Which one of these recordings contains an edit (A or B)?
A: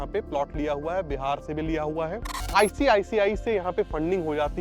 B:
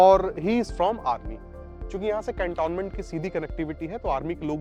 A